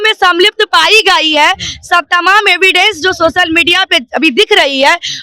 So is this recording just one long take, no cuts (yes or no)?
yes